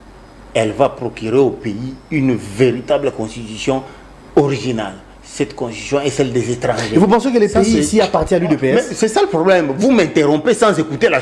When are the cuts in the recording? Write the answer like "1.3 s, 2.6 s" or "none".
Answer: none